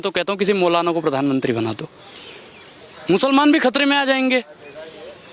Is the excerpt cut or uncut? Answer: uncut